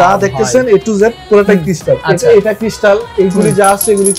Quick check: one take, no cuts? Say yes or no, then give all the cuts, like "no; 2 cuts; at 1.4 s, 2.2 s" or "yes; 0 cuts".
yes; 0 cuts